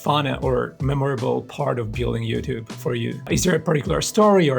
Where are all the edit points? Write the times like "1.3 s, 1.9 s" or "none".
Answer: 3.3 s